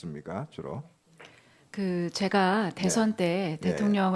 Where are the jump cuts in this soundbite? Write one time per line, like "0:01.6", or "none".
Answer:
0:02.7

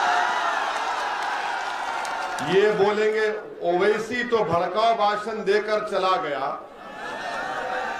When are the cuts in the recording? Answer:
none

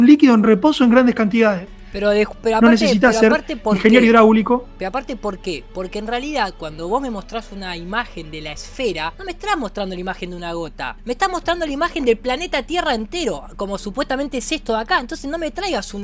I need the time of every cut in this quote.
0:09.2
0:11.0

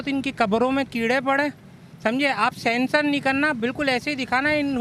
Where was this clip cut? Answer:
none

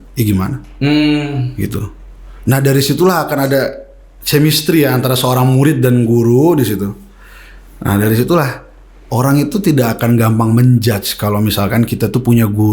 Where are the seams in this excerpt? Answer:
none

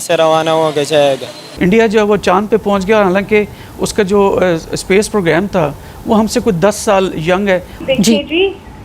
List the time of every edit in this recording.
0:01.4
0:07.7

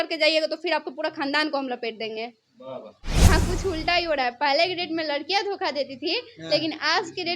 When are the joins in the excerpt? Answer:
0:03.3

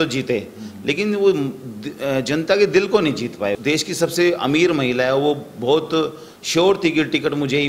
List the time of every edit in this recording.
0:03.6

